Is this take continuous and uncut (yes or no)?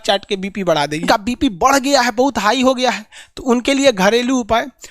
no